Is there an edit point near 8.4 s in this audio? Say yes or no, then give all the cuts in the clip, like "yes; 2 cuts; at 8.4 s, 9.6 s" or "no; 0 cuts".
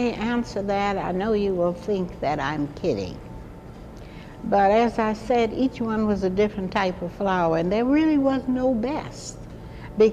yes; 1 cut; at 8.4 s